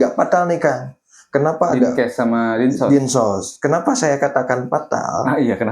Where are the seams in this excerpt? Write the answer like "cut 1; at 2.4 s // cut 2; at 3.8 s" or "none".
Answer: none

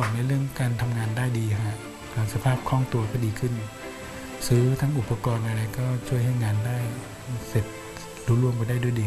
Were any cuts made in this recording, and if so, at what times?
none

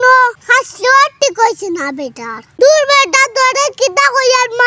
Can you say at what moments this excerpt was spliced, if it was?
cut 1; at 2.5 s

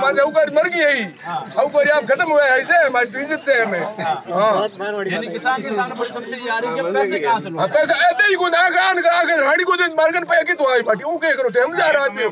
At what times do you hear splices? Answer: none

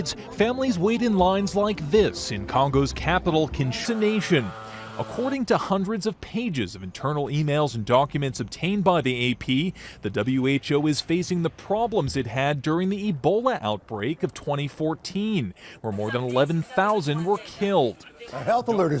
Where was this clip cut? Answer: none

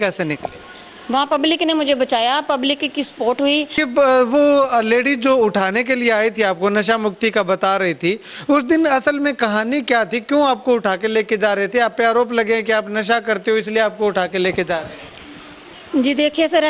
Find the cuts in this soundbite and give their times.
cut 1; at 3.7 s

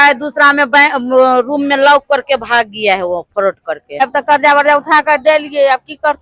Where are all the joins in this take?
cut 1; at 4.0 s

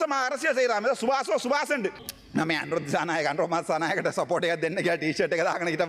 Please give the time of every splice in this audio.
cut 1; at 2.1 s

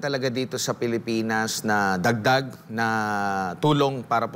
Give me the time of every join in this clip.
none

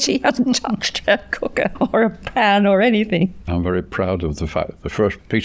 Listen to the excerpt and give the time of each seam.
cut 1; at 0.9 s // cut 2; at 1.7 s // cut 3; at 3.4 s

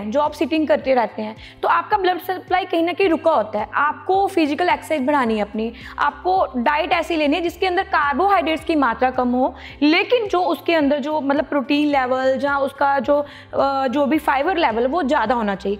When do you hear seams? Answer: none

